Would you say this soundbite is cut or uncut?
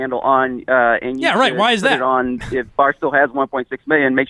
uncut